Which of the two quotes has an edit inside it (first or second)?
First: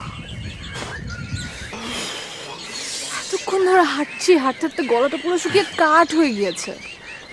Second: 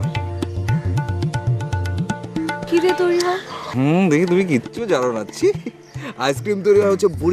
second